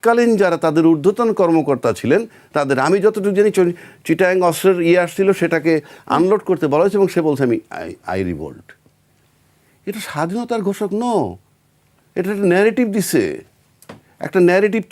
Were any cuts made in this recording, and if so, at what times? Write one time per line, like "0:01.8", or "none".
none